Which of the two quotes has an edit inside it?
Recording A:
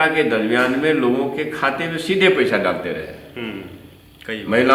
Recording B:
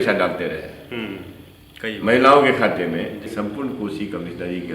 B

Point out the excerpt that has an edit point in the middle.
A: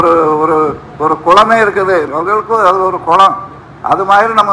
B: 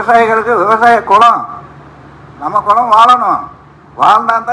A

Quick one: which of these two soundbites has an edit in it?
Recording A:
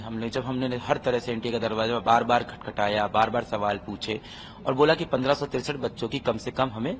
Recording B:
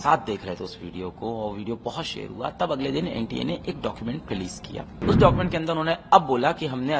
B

